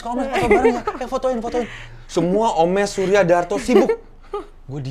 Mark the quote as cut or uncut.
uncut